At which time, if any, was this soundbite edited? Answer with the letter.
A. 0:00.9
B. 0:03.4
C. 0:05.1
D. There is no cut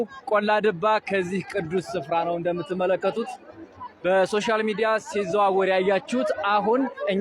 D